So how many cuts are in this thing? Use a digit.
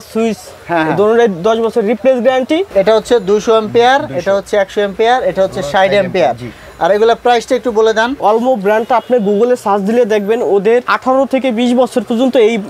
2